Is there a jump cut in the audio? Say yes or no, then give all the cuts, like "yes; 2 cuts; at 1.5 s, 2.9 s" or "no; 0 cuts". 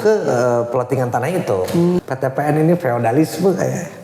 yes; 1 cut; at 2.0 s